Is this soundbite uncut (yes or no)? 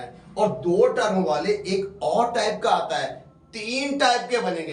yes